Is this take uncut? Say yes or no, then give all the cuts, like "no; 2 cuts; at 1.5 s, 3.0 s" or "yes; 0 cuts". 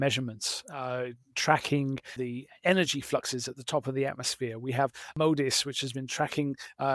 no; 2 cuts; at 2.1 s, 5.1 s